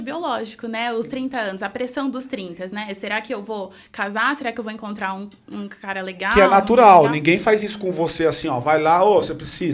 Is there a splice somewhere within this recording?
no; 0 cuts

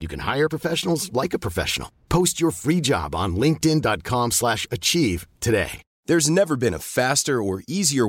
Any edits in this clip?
yes; 1 cut; at 5.9 s

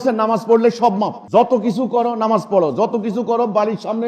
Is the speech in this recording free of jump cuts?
no; 1 cut; at 1.2 s

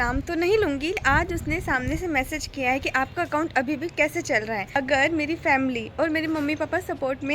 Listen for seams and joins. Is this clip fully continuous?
no; 2 cuts; at 1.0 s, 4.8 s

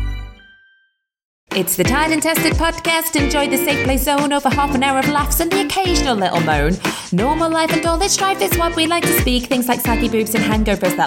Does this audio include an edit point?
yes; 1 cut; at 1.4 s

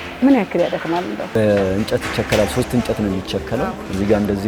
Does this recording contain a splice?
yes; 1 cut; at 1.3 s

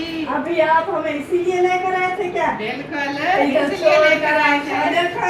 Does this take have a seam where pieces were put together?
no; 0 cuts

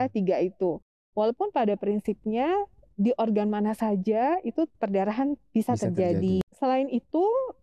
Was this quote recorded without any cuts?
no; 1 cut; at 6.4 s

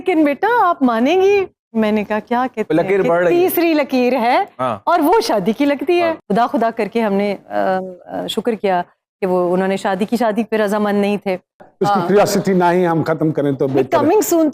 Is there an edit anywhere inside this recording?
yes; 2 cuts; at 6.2 s, 11.7 s

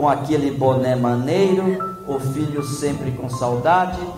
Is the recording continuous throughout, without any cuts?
yes; 0 cuts

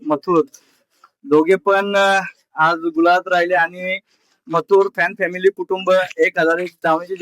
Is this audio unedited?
yes; 0 cuts

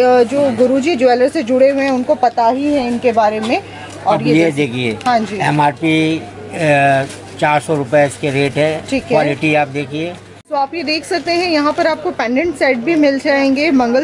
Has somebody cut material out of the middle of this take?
yes; 1 cut; at 10.4 s

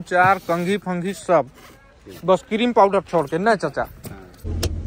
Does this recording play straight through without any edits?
yes; 0 cuts

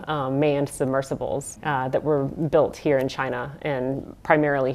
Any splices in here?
yes; 1 cut; at 1.5 s

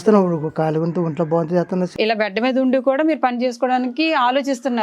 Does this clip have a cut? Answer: yes; 1 cut; at 1.9 s

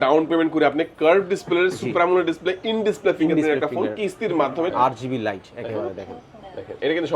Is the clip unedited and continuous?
no; 1 cut; at 4.7 s

